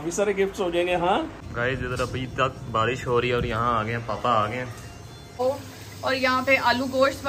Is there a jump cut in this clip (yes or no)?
yes